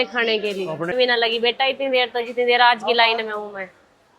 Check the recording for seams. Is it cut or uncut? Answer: cut